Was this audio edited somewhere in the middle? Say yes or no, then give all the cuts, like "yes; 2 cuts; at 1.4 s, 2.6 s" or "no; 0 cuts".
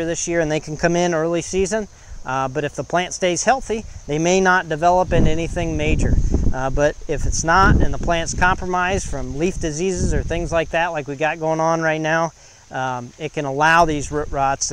no; 0 cuts